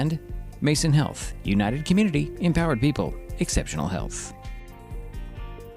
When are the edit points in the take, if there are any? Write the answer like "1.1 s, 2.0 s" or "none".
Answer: 4.1 s